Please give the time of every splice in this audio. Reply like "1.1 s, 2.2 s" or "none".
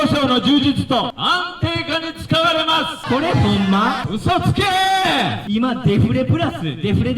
1.2 s, 3.0 s, 4.1 s, 5.4 s